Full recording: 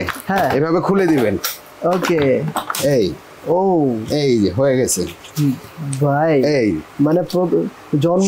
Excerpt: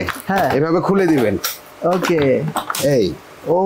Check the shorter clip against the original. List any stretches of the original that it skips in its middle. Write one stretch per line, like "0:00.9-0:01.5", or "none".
none